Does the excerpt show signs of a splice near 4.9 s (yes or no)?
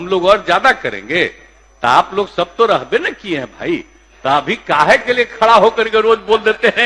no